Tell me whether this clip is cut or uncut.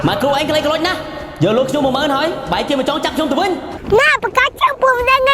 uncut